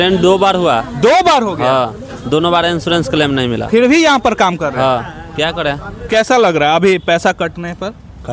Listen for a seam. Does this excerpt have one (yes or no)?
yes